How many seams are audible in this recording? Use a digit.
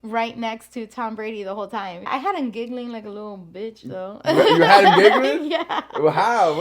1